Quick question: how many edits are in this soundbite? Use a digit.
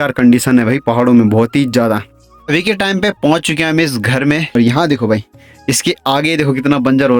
2